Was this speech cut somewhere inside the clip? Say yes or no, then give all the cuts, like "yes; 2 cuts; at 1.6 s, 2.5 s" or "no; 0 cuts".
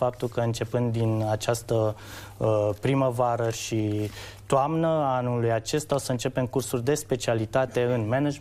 no; 0 cuts